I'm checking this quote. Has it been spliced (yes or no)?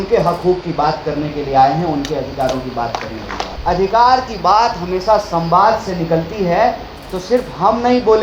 yes